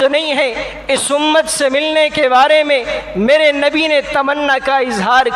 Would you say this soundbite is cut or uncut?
uncut